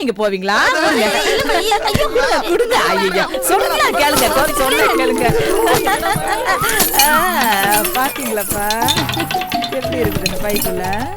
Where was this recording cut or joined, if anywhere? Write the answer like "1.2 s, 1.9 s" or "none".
none